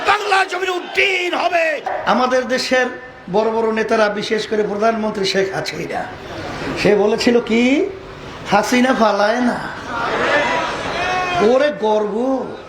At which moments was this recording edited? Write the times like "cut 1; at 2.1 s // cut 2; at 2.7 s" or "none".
cut 1; at 1.9 s